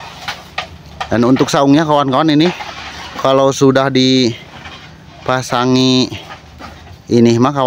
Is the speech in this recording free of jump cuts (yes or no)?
yes